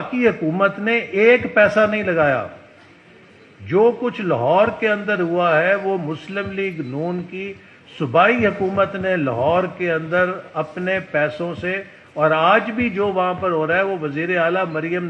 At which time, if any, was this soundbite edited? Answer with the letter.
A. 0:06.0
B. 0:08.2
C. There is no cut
C